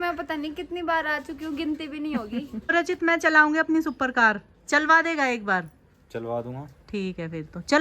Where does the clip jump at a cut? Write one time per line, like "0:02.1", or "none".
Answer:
0:02.6